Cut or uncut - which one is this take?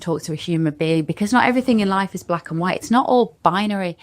uncut